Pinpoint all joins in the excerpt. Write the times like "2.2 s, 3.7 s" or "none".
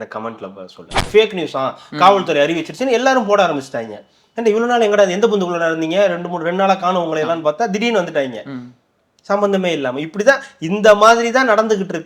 1.0 s